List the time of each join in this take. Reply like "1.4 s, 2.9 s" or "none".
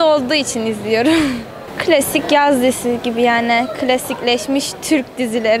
none

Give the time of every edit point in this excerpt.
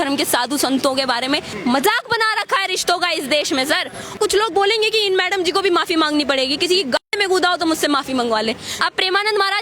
1.5 s, 4.1 s, 8.7 s

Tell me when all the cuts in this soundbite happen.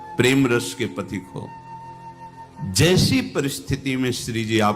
1.5 s, 2.6 s

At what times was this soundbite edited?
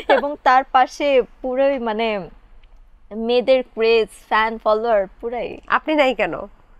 none

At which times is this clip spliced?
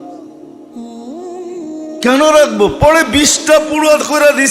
2.0 s

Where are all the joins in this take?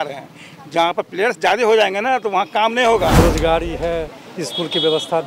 3.1 s

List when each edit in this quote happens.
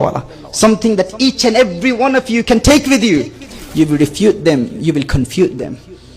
3.5 s

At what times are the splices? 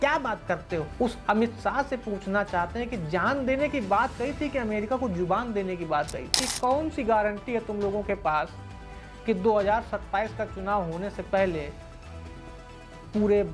6.4 s

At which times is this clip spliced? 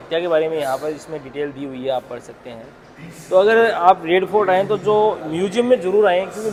none

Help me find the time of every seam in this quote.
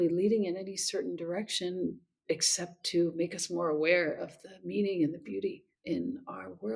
5.7 s

